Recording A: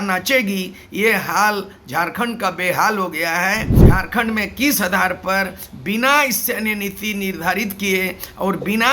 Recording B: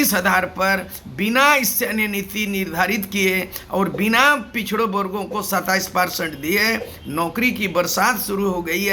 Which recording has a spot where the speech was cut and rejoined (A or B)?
A